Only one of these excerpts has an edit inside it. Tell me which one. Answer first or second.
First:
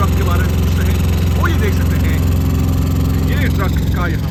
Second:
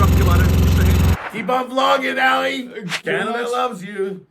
second